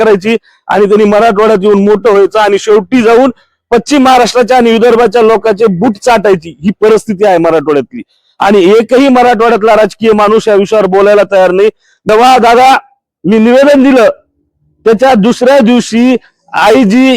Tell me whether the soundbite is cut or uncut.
cut